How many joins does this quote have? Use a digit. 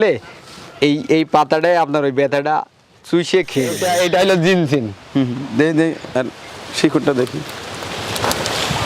1